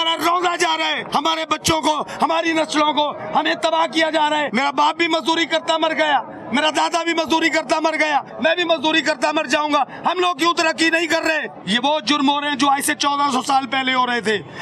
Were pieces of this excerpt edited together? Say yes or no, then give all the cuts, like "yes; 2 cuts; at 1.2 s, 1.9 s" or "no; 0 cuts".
yes; 4 cuts; at 1.0 s, 4.5 s, 8.3 s, 11.5 s